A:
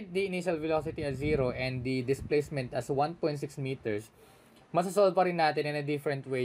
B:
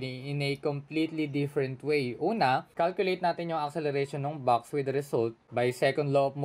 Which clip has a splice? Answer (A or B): B